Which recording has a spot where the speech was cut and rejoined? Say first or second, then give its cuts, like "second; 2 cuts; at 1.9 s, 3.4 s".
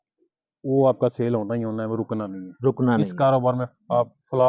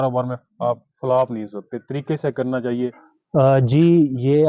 second; 1 cut; at 3.1 s